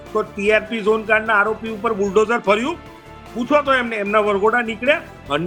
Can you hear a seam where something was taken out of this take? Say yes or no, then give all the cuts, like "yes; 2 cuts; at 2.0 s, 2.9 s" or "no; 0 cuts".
no; 0 cuts